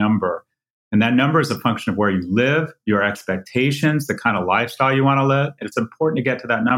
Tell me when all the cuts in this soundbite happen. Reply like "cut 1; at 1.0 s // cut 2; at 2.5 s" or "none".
cut 1; at 5.6 s